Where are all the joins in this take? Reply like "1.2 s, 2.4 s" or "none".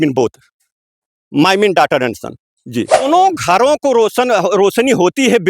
3.0 s